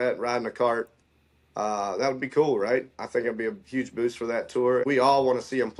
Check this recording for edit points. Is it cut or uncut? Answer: cut